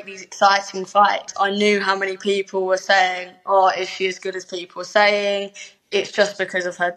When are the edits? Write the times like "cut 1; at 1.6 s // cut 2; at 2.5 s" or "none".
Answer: cut 1; at 1.3 s